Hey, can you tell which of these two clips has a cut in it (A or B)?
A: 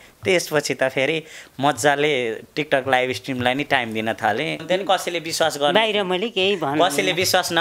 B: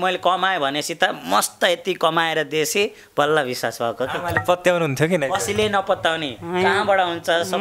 A